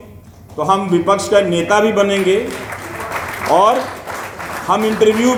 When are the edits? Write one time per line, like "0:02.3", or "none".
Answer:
none